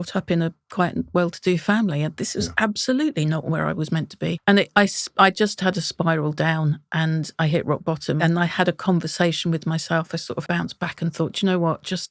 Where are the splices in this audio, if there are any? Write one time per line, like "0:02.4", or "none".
0:04.4
0:08.2
0:10.5